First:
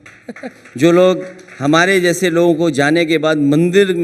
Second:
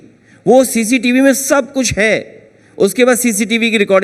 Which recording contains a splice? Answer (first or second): first